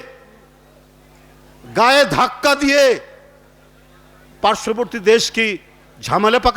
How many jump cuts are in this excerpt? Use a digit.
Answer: 0